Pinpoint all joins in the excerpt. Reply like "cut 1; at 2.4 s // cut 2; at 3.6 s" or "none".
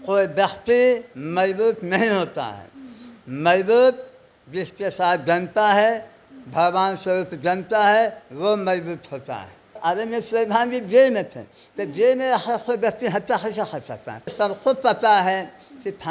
cut 1; at 9.8 s // cut 2; at 14.3 s